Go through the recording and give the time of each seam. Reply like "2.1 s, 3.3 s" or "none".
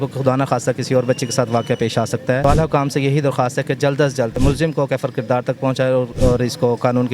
2.4 s, 4.4 s, 6.1 s